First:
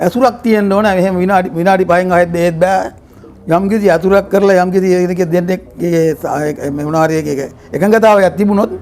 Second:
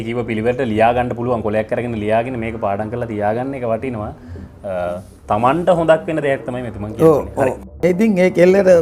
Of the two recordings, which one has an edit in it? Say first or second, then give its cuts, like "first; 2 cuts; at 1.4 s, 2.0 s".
second; 1 cut; at 7.7 s